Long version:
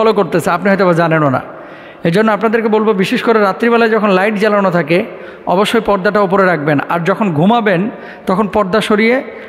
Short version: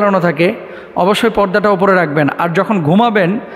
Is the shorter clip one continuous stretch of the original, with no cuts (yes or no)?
yes